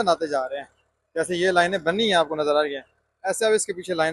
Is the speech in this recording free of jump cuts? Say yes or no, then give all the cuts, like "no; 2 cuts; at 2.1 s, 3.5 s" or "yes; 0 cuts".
yes; 0 cuts